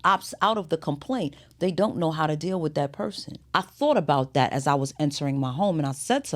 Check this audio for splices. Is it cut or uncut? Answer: cut